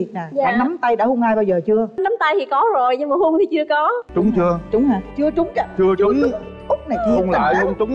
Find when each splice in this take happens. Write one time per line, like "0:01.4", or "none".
0:04.0